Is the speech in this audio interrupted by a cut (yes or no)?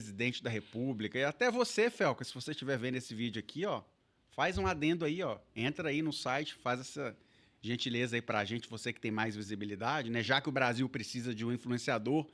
no